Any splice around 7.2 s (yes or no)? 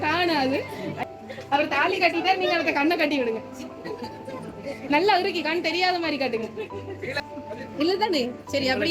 yes